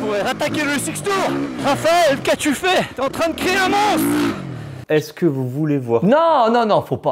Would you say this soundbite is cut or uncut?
cut